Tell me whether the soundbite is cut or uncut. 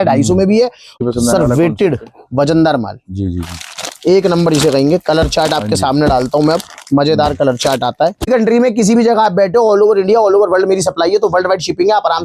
cut